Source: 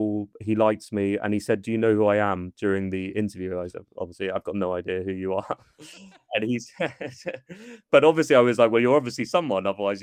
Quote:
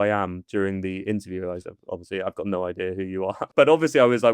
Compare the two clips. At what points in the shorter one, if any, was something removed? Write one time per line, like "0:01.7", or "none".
0:03.4